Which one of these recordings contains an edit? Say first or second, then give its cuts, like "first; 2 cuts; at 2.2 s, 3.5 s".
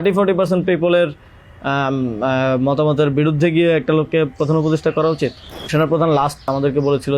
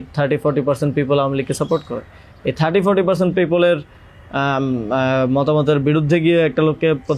first; 2 cuts; at 5.7 s, 6.5 s